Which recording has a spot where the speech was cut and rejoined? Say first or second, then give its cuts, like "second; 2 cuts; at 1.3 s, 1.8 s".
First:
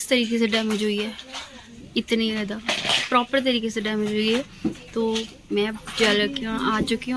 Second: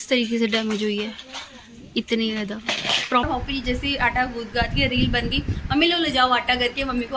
second; 1 cut; at 3.3 s